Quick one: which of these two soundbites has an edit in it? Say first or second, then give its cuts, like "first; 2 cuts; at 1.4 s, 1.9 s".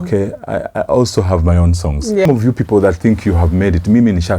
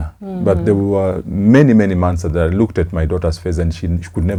first; 1 cut; at 2.3 s